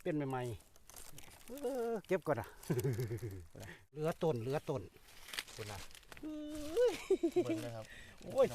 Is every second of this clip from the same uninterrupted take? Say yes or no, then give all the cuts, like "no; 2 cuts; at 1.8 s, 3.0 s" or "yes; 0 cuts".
no; 1 cut; at 3.9 s